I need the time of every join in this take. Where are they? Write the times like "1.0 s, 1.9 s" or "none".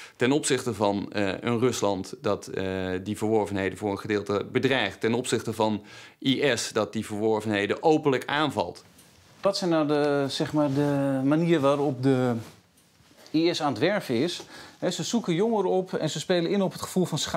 8.7 s